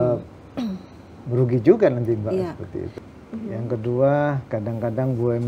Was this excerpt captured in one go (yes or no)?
no